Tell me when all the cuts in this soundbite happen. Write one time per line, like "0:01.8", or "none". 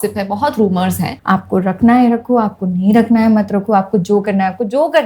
0:01.1